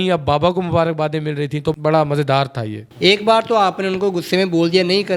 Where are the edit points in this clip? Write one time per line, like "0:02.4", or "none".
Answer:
0:01.8
0:02.8